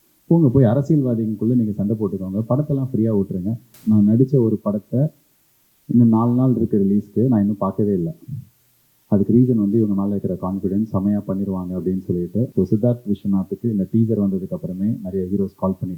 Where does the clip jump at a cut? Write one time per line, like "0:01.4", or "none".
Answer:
0:03.7
0:12.5